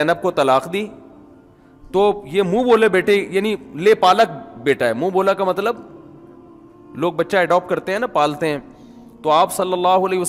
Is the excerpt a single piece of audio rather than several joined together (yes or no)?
yes